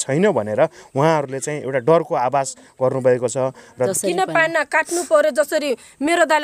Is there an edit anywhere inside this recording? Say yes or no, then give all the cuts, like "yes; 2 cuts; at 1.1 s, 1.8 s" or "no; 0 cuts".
yes; 1 cut; at 3.9 s